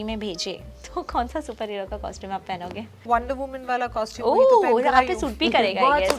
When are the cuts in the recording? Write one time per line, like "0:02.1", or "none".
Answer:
0:03.0